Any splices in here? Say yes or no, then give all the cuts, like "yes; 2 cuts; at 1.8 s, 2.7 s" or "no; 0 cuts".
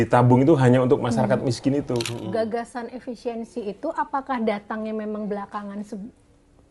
yes; 1 cut; at 2.2 s